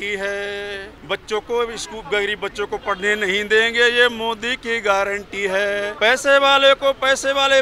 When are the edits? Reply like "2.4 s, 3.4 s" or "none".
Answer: 0.9 s, 5.9 s